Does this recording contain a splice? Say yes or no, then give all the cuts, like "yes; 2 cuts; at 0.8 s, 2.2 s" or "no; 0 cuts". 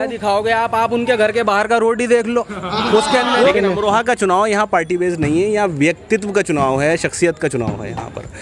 yes; 1 cut; at 3.5 s